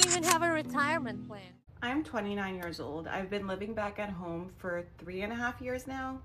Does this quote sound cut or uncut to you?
cut